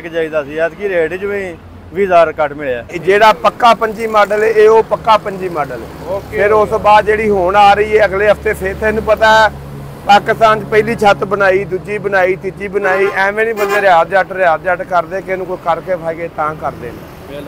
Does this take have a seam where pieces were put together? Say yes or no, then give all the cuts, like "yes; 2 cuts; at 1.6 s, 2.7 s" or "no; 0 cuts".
yes; 1 cut; at 2.9 s